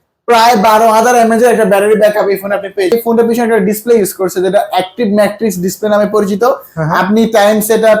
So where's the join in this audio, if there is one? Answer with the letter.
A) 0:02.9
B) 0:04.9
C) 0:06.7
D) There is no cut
A